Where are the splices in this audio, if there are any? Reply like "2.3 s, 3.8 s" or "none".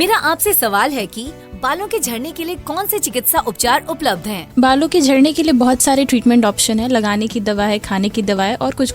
0.9 s